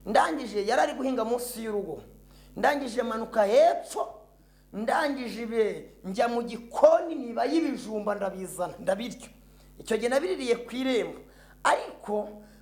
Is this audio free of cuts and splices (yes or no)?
yes